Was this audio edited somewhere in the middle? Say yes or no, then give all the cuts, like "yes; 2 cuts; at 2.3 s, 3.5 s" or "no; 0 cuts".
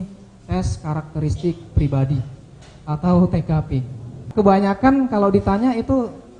yes; 1 cut; at 4.2 s